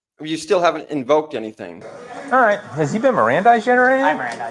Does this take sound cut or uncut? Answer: cut